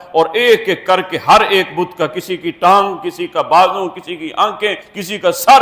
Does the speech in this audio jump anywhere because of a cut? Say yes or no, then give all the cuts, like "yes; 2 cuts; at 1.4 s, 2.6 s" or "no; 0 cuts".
no; 0 cuts